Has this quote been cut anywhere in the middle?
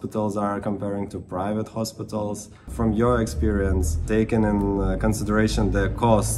yes; 2 cuts; at 2.7 s, 4.0 s

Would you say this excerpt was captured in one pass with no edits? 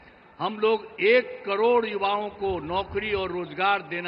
yes; 0 cuts

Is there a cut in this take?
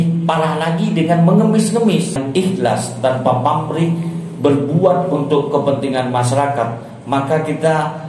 yes; 1 cut; at 2.2 s

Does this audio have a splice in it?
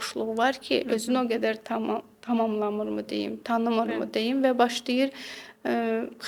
no; 0 cuts

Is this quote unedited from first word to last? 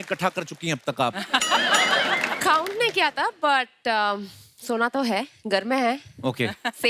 yes; 0 cuts

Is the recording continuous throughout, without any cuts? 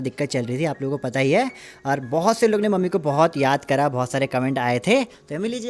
yes; 0 cuts

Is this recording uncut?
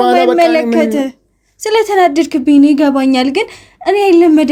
yes; 0 cuts

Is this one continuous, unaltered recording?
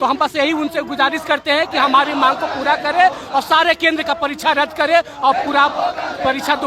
yes; 0 cuts

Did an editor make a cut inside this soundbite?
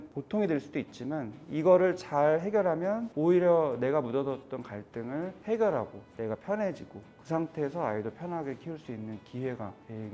no; 0 cuts

